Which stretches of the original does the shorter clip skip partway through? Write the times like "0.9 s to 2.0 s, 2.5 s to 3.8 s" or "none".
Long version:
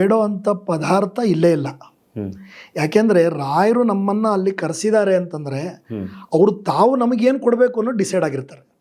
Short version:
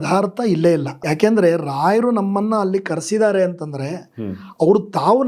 1.7 s to 2.7 s